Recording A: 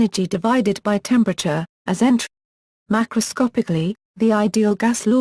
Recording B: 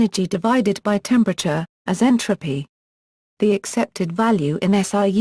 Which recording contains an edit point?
B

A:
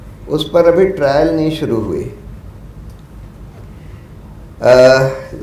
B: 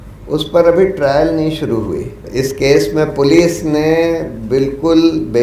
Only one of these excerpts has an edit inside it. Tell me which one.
B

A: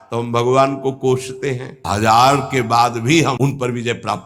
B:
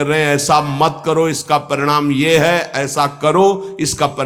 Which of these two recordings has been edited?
A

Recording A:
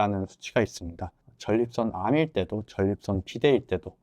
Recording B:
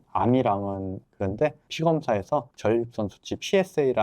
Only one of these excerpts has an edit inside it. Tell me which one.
B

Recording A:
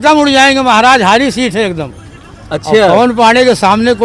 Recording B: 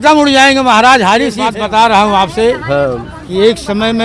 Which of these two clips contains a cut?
B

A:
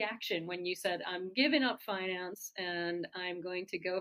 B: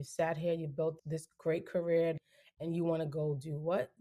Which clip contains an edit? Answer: B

